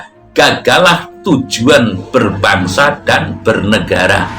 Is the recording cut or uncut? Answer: uncut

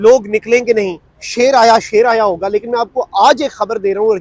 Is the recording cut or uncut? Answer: uncut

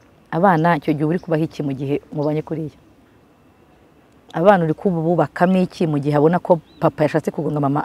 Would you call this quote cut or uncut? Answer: uncut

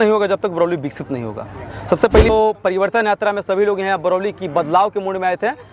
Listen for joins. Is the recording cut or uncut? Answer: cut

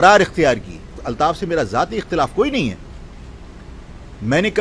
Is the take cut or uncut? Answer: cut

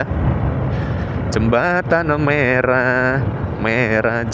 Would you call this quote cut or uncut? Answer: uncut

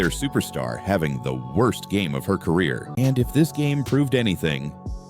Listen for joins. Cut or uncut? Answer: cut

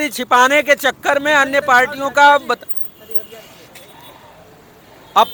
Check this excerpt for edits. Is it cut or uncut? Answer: uncut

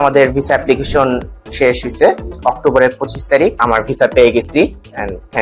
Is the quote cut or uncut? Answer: cut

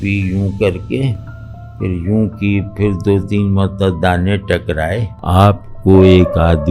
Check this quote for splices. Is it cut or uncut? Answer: cut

